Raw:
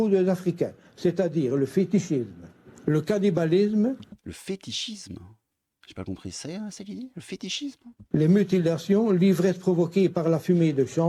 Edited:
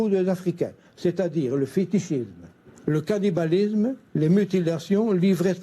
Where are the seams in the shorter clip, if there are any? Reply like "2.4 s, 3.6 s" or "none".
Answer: 4.0 s